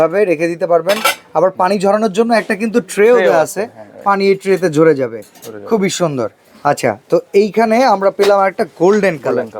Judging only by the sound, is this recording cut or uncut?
uncut